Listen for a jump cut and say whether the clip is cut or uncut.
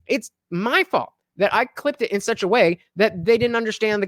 uncut